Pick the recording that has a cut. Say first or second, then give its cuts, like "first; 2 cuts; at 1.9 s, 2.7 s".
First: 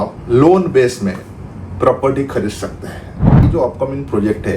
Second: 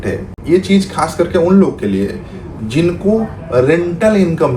first; 1 cut; at 3.4 s